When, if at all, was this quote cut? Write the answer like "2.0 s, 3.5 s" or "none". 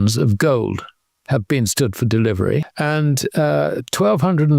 2.7 s